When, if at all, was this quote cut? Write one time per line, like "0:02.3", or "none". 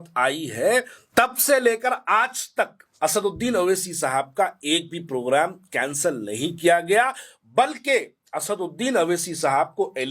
0:01.0
0:02.8